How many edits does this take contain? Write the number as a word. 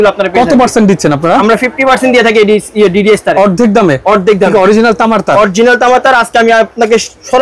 zero